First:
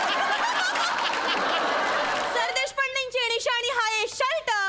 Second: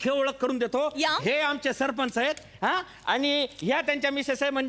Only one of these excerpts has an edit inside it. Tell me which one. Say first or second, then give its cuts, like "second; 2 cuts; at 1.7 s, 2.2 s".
first; 1 cut; at 2.3 s